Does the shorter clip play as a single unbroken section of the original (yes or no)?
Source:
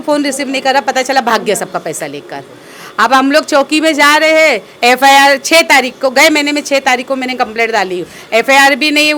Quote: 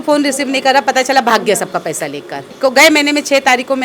no